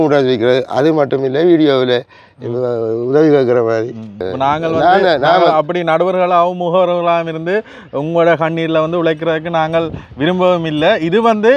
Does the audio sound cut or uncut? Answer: cut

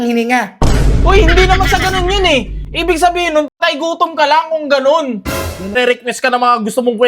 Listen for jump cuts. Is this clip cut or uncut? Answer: cut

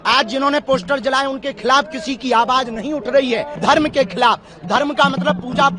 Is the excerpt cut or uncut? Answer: cut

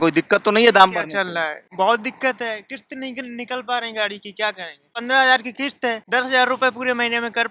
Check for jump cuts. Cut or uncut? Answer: cut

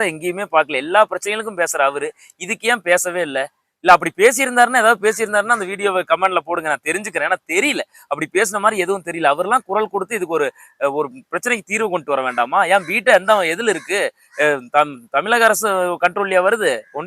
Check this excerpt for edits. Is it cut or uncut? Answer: uncut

